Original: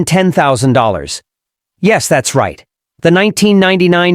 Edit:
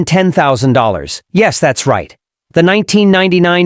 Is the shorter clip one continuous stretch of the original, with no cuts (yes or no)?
no